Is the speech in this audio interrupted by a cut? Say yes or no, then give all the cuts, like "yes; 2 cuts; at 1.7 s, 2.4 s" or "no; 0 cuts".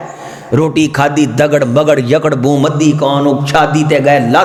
no; 0 cuts